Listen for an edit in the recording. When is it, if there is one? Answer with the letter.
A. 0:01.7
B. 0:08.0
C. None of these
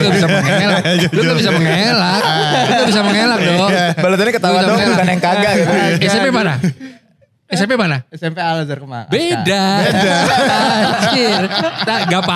C